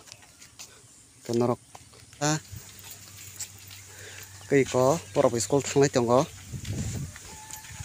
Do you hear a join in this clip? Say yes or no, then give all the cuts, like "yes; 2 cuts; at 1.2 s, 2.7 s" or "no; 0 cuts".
yes; 1 cut; at 2.2 s